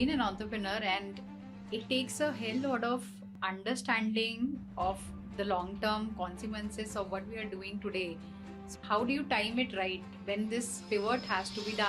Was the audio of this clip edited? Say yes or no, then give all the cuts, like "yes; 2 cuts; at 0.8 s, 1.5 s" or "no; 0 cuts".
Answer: yes; 2 cuts; at 3.4 s, 8.8 s